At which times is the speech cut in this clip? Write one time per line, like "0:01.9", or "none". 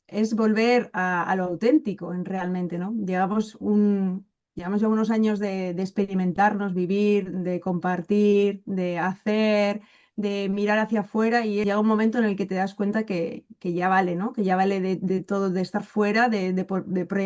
0:11.6